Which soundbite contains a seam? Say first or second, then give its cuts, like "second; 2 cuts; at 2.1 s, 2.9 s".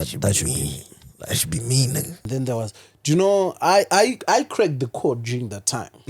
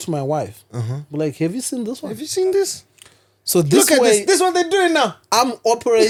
first; 1 cut; at 2.3 s